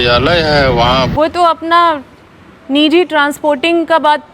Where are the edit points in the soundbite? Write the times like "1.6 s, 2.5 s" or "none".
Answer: 1.1 s